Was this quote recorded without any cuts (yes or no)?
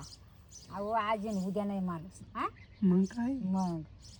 yes